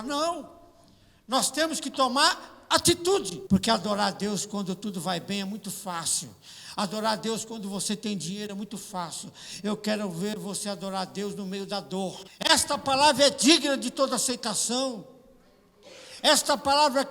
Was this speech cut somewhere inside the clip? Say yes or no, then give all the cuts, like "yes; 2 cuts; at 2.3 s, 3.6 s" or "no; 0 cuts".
yes; 2 cuts; at 3.3 s, 12.3 s